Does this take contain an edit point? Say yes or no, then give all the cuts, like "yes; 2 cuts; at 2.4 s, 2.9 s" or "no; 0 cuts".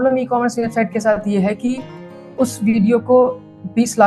no; 0 cuts